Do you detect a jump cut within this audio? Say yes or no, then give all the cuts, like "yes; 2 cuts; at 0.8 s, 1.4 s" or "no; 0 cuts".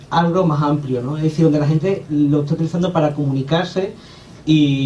yes; 1 cut; at 2.0 s